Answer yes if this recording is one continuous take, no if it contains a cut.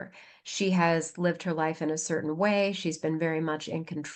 yes